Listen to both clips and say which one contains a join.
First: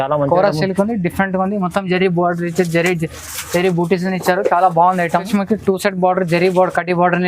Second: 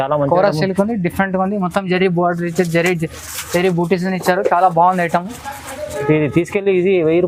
first; 1 cut; at 5.3 s

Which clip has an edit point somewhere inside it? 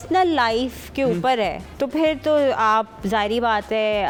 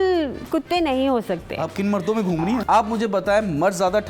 second; 1 cut; at 2.6 s

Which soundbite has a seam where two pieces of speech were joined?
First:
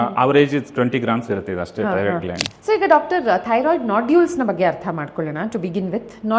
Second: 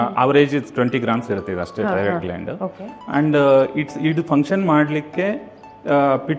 first; 1 cut; at 2.5 s

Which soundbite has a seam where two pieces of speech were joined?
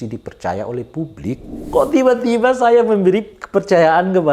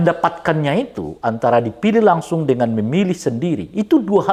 first; 1 cut; at 1.6 s

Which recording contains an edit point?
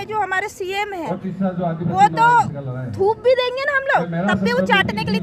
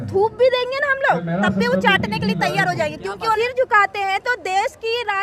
second; 1 cut; at 3.4 s

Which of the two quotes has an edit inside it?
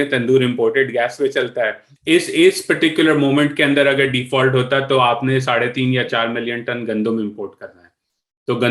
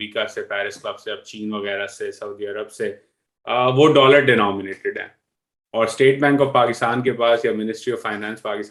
first; 1 cut; at 1.9 s

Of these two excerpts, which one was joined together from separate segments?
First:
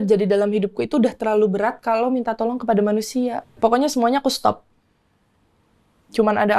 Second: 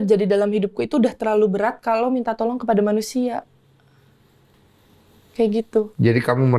first; 1 cut; at 3.5 s

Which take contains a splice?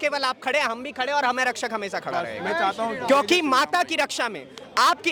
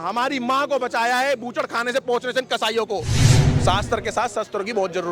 second; 1 cut; at 3.2 s

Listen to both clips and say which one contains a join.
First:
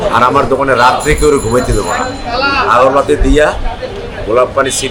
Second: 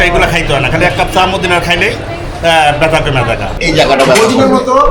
second; 1 cut; at 3.5 s

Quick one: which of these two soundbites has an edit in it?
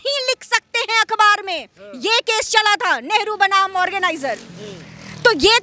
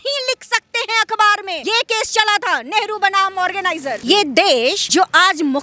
second; 3 cuts; at 1.6 s, 4.0 s, 4.8 s

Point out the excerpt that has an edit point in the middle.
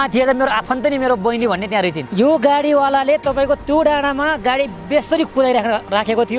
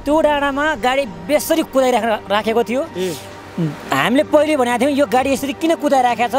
first; 1 cut; at 2.0 s

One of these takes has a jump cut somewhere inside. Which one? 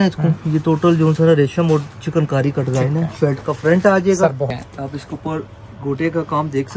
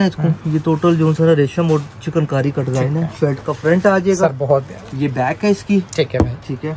first; 1 cut; at 4.5 s

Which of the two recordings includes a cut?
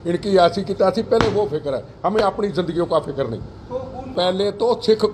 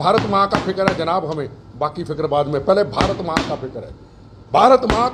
first; 1 cut; at 4.0 s

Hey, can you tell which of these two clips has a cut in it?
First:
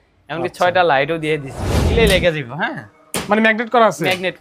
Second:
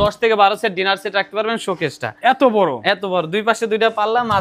first; 1 cut; at 1.9 s

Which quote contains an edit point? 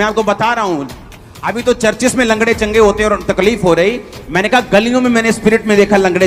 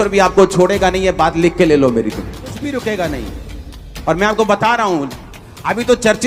second; 1 cut; at 2.6 s

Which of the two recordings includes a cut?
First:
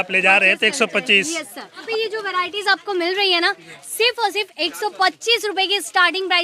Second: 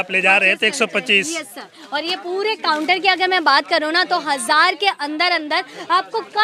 first; 1 cut; at 1.8 s

